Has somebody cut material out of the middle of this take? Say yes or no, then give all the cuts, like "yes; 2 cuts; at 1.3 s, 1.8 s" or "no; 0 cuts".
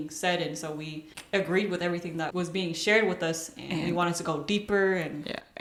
no; 0 cuts